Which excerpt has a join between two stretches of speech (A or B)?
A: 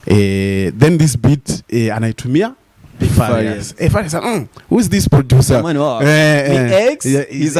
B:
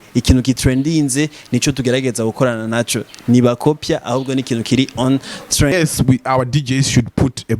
B